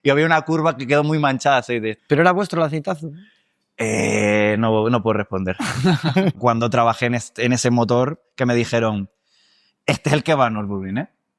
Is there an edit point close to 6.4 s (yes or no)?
yes